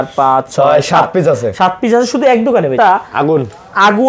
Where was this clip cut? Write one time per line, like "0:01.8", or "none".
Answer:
0:02.7